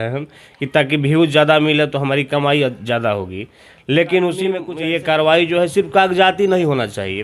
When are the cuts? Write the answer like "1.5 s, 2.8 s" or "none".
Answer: 4.7 s